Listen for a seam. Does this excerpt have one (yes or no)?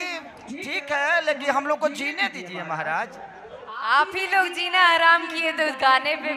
no